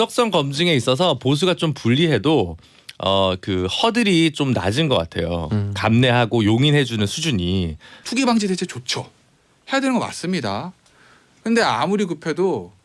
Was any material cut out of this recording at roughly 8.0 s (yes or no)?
yes